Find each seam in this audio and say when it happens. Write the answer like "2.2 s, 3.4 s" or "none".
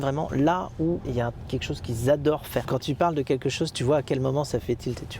1.0 s, 2.7 s